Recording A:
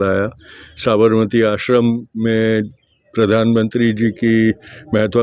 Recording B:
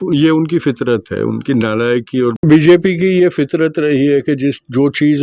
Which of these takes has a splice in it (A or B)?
B